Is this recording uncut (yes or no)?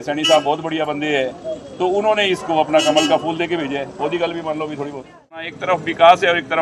no